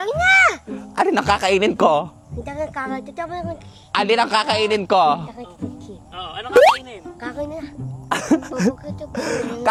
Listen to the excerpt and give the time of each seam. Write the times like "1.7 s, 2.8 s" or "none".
none